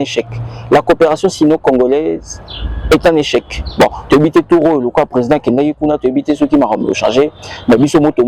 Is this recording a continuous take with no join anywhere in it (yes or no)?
yes